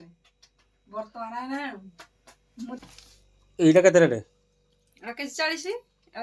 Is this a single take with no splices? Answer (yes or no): no